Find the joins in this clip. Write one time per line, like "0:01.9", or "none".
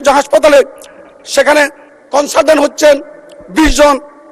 none